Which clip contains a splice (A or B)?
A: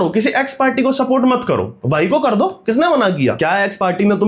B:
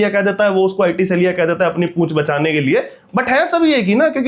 A